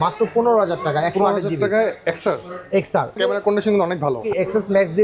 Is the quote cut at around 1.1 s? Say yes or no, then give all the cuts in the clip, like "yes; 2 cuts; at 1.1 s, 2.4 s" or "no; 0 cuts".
no; 2 cuts; at 3.1 s, 4.2 s